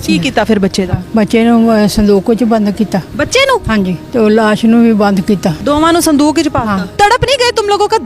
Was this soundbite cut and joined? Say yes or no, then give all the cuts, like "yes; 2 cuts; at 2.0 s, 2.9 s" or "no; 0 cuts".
yes; 4 cuts; at 1.0 s, 3.7 s, 5.5 s, 6.9 s